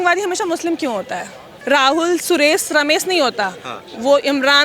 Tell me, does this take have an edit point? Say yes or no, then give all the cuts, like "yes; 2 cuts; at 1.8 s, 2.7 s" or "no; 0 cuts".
yes; 1 cut; at 1.5 s